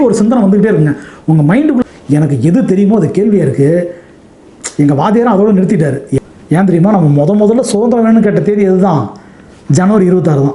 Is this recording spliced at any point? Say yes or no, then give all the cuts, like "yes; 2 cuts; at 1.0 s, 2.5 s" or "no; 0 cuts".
yes; 2 cuts; at 1.8 s, 6.1 s